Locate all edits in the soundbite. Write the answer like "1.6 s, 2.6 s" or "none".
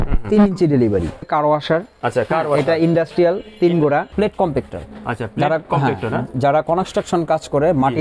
1.2 s, 4.1 s